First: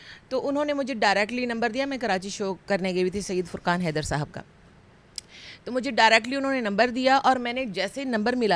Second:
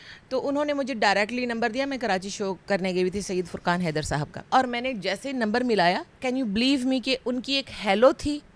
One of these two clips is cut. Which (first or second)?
second